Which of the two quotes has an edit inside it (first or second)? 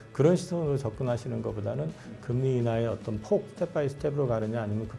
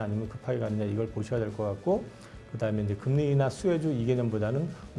first